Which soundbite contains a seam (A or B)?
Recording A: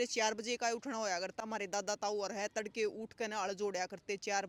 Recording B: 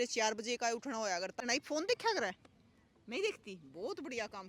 B